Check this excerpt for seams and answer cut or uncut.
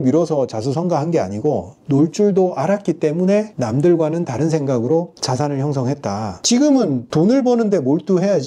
cut